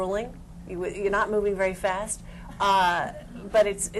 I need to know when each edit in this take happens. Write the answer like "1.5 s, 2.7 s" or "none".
none